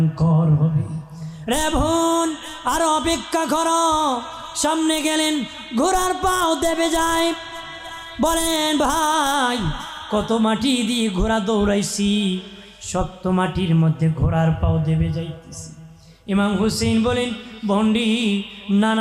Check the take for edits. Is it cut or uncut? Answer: uncut